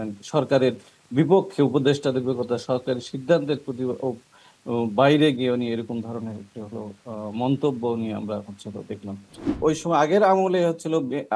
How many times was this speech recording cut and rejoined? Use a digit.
1